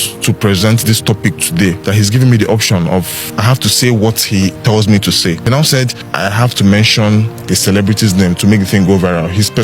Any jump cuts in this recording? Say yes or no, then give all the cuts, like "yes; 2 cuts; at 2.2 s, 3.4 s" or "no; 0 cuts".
yes; 4 cuts; at 1.8 s, 3.2 s, 5.8 s, 7.4 s